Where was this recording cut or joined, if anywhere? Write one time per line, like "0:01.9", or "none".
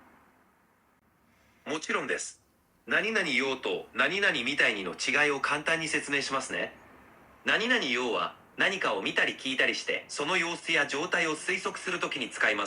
none